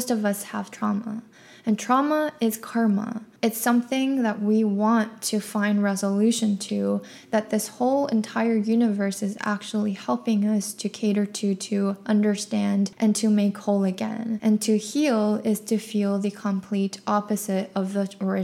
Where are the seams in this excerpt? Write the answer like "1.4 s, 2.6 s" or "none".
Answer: 3.2 s, 12.9 s, 14.3 s